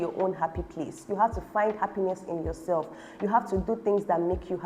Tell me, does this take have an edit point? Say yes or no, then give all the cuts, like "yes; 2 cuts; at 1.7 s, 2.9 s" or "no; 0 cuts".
no; 0 cuts